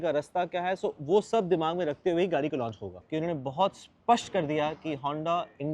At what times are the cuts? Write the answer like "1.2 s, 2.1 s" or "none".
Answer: 2.9 s